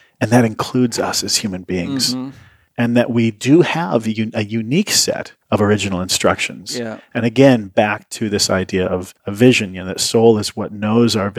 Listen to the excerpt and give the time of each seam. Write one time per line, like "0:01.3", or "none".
0:05.3
0:09.2